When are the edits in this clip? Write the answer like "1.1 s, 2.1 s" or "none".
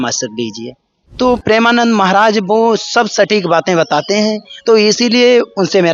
1.0 s